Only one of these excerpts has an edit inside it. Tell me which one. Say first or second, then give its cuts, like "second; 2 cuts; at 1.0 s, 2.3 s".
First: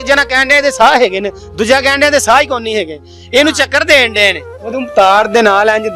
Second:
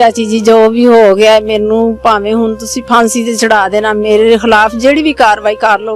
first; 1 cut; at 4.8 s